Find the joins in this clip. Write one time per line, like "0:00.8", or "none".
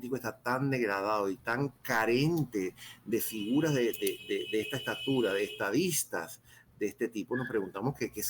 none